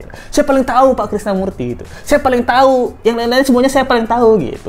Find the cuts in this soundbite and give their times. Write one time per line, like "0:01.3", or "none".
none